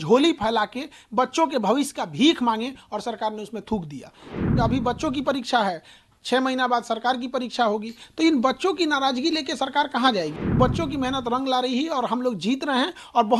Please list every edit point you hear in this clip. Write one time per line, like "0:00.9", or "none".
0:04.4
0:10.6

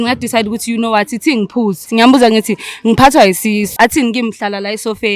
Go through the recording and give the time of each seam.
0:01.9
0:03.8

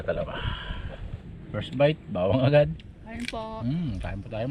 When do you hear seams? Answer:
0:01.2

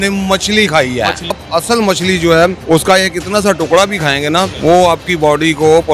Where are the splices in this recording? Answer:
0:01.4
0:02.6
0:04.5

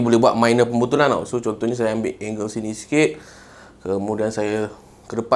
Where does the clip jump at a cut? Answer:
none

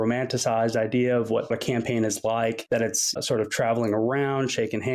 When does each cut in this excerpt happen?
0:01.5
0:03.1

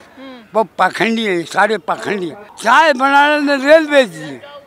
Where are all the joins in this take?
0:02.5

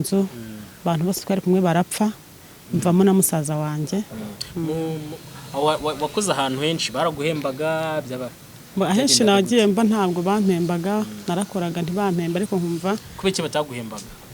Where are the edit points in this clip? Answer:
0:04.1

